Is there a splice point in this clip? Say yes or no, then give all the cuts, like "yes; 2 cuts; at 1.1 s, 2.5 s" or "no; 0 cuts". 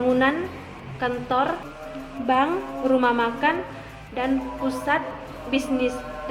yes; 1 cut; at 1.7 s